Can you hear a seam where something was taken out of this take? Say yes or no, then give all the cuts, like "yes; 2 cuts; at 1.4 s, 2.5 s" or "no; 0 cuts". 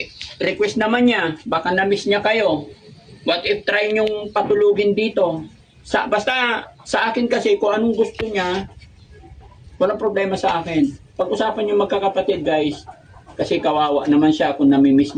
no; 0 cuts